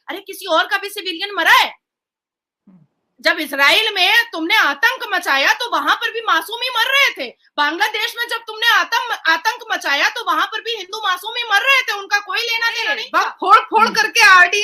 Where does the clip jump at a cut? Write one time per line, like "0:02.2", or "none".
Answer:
0:13.0